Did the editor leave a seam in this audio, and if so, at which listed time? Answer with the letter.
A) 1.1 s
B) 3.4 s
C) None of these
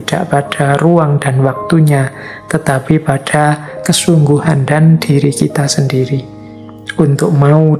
C